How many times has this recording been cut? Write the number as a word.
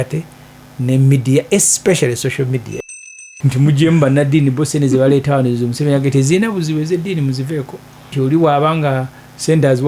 two